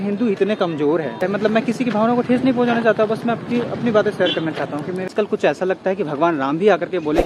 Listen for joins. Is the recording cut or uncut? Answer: cut